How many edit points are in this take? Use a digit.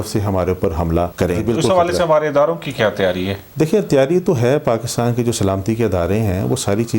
1